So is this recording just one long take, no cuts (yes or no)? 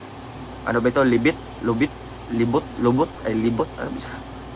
yes